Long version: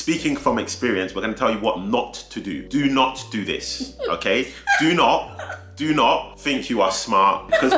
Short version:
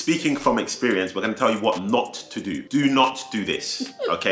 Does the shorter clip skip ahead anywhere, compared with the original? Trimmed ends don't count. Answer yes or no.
no